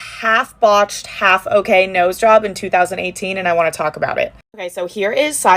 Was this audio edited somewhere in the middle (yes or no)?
no